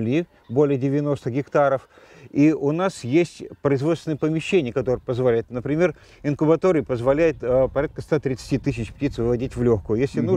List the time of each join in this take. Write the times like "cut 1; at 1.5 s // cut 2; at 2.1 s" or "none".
none